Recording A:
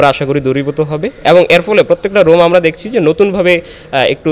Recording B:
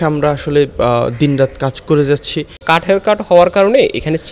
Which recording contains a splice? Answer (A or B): B